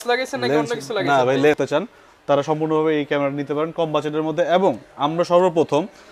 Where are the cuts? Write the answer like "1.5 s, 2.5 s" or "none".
1.6 s